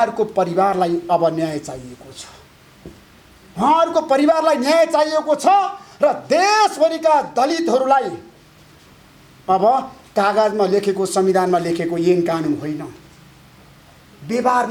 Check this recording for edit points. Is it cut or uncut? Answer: uncut